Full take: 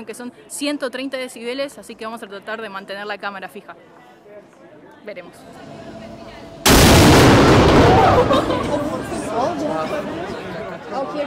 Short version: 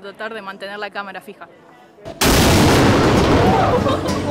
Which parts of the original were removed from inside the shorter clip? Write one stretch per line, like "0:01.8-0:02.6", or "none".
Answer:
0:04.3-0:06.4